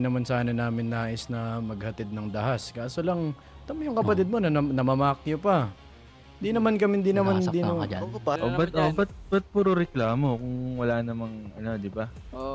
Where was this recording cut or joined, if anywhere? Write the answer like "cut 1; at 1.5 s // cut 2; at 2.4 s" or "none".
cut 1; at 8.4 s